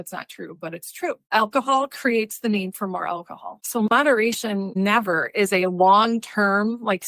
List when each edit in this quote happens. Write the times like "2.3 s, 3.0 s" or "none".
none